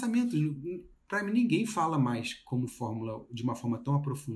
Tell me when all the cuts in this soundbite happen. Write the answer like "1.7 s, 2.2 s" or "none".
none